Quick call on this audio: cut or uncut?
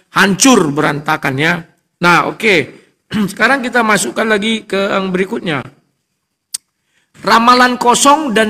uncut